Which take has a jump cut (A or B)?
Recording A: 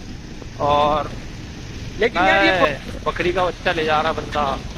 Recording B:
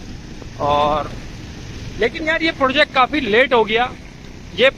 A